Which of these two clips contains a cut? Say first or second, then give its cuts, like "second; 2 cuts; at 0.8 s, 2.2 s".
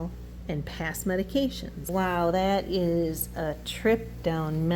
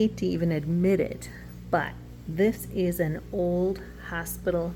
first; 1 cut; at 1.9 s